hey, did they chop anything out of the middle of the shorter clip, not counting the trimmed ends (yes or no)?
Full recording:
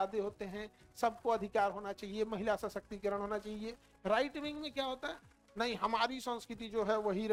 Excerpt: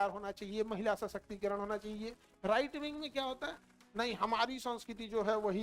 no